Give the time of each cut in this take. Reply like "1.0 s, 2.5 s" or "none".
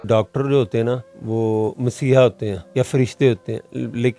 1.1 s, 2.6 s